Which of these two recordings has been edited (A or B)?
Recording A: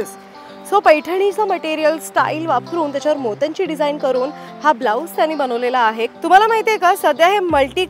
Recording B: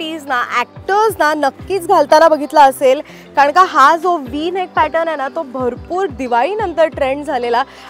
A